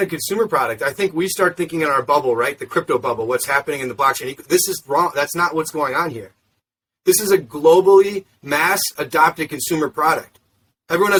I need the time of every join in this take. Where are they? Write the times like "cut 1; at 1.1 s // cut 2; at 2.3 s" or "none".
none